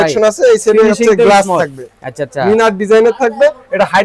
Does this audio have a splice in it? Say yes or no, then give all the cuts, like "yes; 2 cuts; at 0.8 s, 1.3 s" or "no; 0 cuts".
no; 0 cuts